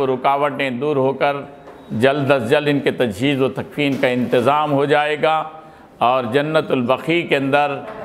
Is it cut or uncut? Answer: uncut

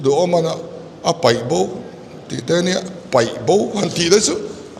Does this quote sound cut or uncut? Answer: uncut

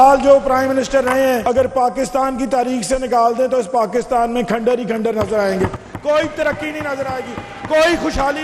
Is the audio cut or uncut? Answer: cut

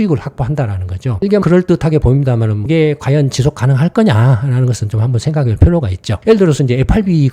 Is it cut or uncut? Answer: cut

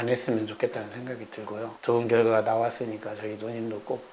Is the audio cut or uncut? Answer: cut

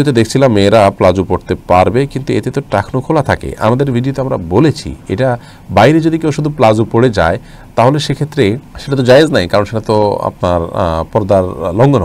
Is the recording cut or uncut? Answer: uncut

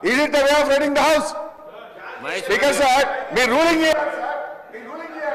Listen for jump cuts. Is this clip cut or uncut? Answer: uncut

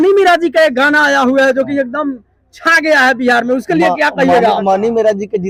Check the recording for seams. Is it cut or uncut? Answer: uncut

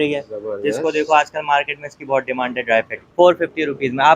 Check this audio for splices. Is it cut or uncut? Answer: cut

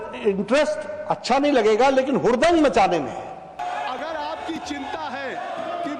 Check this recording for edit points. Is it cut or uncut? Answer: cut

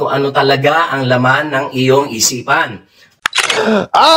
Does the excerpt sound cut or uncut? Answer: cut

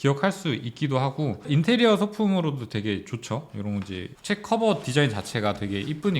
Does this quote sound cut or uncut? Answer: uncut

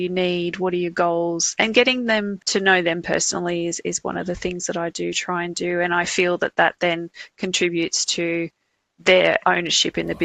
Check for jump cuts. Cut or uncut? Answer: cut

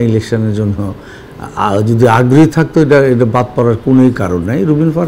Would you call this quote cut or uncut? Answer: uncut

